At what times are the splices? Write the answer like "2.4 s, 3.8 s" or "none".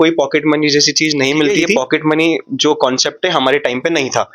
1.7 s